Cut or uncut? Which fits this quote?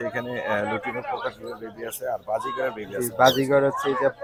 uncut